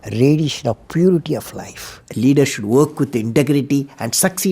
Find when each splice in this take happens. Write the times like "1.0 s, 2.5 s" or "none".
2.0 s